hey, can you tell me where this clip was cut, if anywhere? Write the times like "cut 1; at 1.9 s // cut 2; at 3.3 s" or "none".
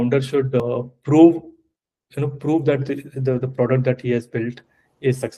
none